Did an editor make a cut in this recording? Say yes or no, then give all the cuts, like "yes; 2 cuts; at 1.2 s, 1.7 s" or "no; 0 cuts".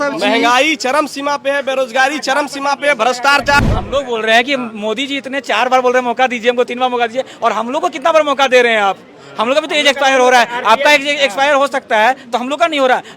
yes; 1 cut; at 3.6 s